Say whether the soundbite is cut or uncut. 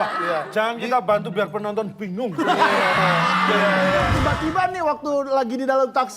cut